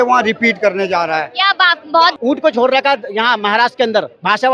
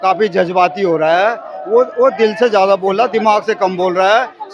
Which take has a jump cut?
first; 1 cut; at 2.2 s

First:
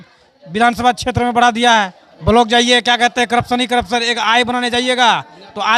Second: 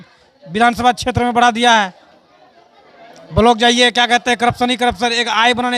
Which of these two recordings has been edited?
first; 1 cut; at 2.0 s

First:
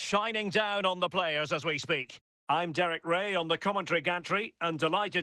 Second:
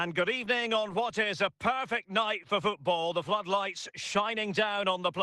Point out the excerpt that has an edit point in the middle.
first; 1 cut; at 2.3 s

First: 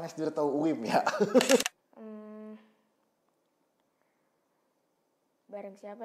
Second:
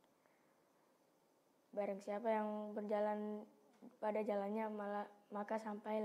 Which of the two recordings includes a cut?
first; 1 cut; at 1.6 s

